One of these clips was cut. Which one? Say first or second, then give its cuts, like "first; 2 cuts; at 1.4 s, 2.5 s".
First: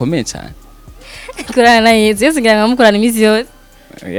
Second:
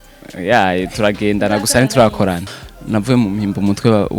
second; 1 cut; at 2.5 s